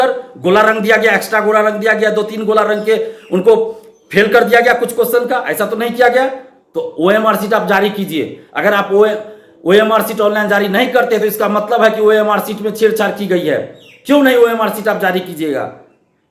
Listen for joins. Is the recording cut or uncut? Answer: uncut